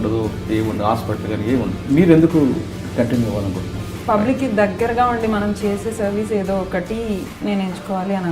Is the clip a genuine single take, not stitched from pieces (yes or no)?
no